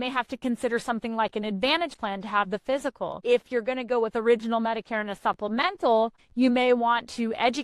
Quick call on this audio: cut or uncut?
cut